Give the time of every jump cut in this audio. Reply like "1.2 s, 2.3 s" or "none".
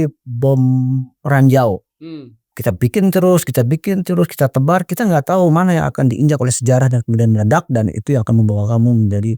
none